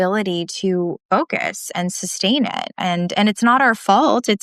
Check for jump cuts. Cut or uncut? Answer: cut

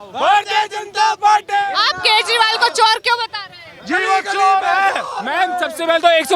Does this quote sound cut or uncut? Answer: uncut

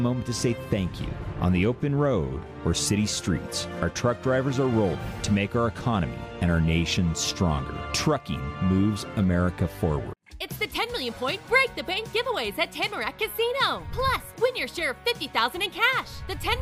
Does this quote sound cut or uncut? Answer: cut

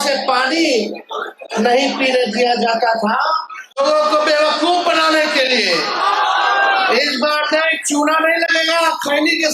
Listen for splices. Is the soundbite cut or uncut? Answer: cut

